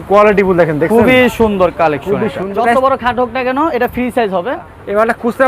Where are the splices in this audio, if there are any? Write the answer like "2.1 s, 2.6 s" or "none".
2.5 s, 4.6 s